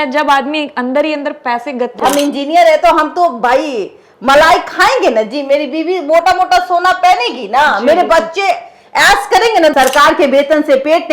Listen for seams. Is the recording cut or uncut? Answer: cut